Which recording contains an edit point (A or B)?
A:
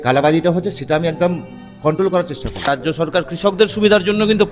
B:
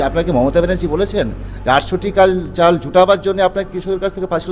A